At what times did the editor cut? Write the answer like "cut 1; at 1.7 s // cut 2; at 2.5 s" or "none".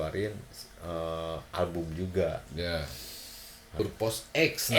cut 1; at 3.7 s